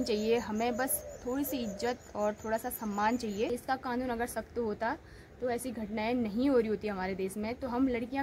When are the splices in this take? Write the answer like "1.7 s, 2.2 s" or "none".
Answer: 3.5 s